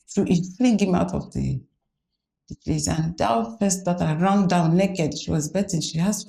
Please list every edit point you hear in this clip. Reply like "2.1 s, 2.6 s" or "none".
none